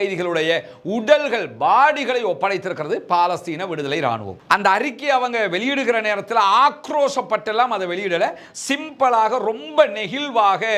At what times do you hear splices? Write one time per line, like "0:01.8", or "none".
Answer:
0:04.3